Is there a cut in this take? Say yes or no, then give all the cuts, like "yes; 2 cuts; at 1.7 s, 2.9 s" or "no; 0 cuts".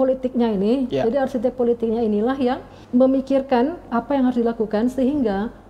yes; 2 cuts; at 2.7 s, 3.9 s